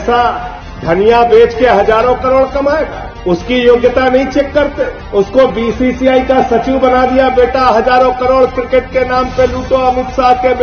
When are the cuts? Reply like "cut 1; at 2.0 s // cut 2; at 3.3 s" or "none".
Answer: none

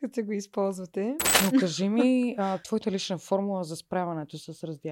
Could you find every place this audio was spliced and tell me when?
cut 1; at 1.3 s // cut 2; at 2.6 s

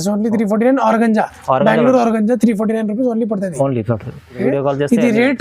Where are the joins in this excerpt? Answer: cut 1; at 4.4 s

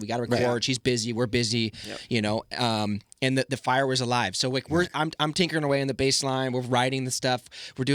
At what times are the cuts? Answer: none

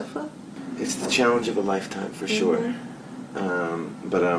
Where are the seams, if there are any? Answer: cut 1; at 1.4 s

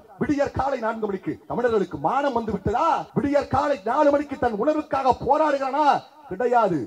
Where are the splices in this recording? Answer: cut 1; at 1.4 s // cut 2; at 3.1 s

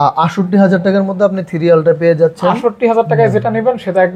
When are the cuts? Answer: none

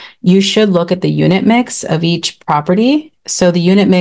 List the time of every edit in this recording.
none

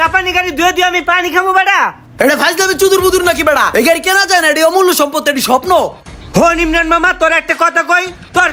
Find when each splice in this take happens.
none

